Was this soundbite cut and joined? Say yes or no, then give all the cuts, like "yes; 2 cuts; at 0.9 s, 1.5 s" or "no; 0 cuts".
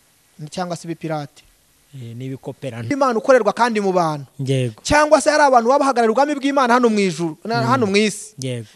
yes; 1 cut; at 2.9 s